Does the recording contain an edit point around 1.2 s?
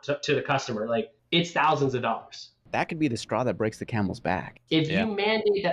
yes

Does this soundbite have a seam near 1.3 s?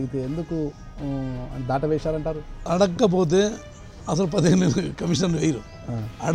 no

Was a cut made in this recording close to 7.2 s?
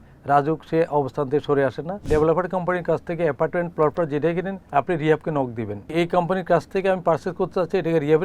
no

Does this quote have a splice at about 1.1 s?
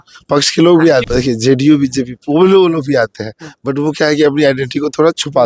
yes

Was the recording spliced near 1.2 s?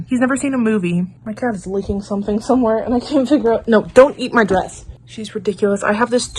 no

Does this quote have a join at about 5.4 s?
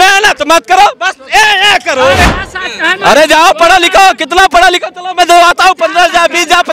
no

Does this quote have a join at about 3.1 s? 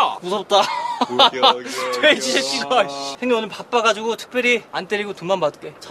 yes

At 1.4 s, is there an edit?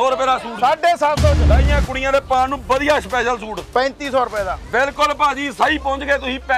yes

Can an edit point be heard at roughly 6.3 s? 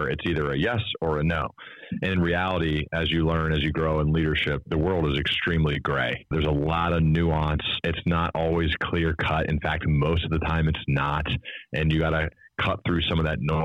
yes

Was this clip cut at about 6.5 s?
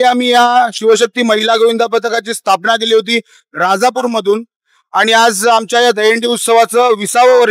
no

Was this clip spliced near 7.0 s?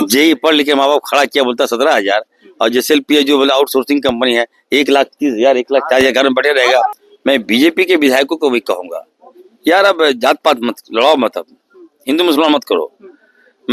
yes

